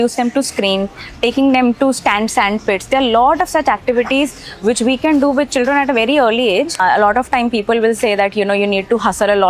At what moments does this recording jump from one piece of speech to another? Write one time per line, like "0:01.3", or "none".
0:06.8